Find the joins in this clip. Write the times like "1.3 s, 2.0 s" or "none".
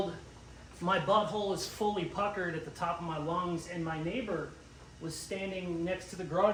none